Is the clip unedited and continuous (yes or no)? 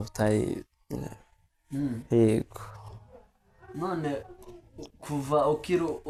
yes